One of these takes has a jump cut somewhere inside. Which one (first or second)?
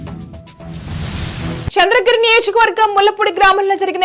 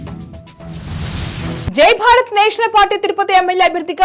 second